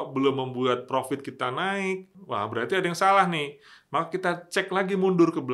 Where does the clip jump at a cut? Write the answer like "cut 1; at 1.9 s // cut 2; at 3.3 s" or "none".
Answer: cut 1; at 2.2 s